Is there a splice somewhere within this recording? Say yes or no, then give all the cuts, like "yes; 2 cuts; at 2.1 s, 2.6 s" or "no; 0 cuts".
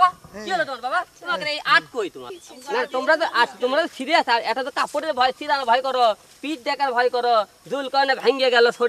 yes; 1 cut; at 2.4 s